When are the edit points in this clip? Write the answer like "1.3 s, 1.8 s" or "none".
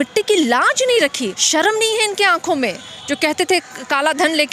1.3 s

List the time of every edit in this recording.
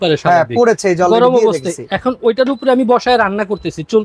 none

